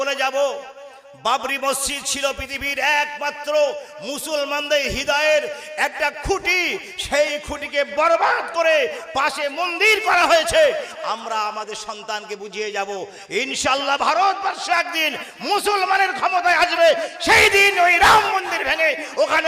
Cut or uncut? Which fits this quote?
uncut